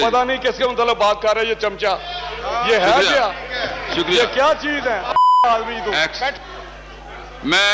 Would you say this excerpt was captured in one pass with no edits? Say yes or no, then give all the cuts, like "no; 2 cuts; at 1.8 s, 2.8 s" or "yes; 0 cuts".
yes; 0 cuts